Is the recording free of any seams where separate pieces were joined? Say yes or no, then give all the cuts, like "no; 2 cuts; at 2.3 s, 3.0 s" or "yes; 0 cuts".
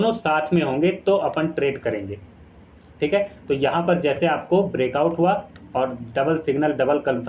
yes; 0 cuts